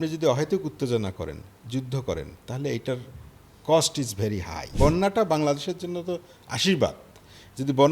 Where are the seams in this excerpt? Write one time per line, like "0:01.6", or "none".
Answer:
0:04.6